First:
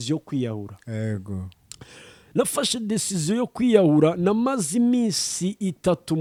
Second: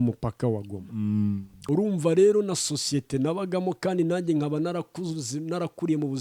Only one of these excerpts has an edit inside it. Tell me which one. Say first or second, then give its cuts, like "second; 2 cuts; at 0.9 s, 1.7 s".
second; 1 cut; at 1.5 s